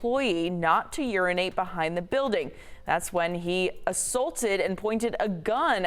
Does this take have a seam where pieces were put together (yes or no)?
yes